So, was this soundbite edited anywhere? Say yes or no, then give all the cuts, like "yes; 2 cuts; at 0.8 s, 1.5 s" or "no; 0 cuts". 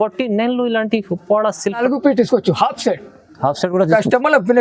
yes; 1 cut; at 1.8 s